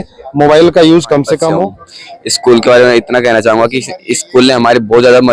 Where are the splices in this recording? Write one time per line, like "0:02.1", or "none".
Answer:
0:01.7